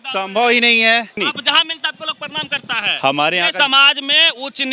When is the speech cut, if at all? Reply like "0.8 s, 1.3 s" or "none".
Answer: 1.2 s